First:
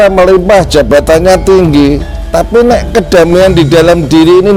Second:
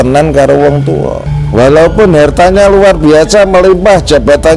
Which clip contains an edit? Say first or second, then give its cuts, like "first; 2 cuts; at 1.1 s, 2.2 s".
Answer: second; 1 cut; at 1.3 s